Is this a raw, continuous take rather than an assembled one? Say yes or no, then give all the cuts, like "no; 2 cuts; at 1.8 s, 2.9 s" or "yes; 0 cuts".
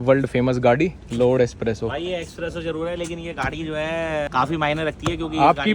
no; 2 cuts; at 1.0 s, 4.3 s